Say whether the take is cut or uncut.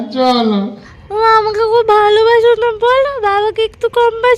cut